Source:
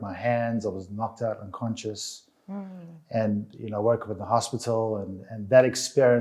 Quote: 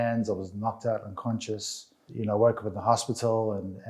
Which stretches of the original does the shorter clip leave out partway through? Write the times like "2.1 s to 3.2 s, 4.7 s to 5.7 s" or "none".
2.4 s to 3.5 s